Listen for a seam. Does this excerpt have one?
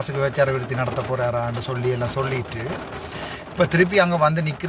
no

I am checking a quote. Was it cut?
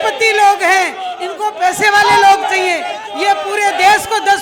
no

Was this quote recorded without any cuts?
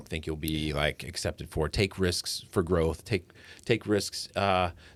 yes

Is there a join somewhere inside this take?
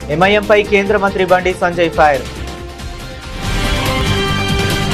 yes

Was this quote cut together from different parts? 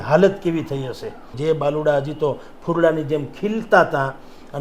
yes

